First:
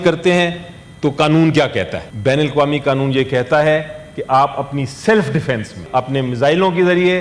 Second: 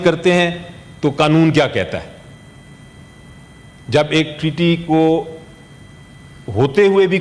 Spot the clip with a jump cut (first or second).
first